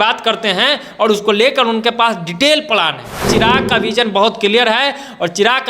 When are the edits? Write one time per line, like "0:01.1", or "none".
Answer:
0:03.3